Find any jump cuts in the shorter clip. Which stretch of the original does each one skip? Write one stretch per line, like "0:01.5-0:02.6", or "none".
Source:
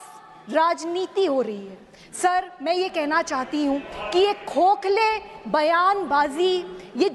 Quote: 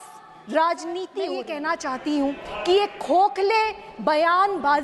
0:01.3-0:02.8